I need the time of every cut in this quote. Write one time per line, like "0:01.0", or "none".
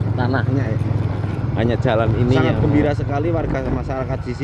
0:02.5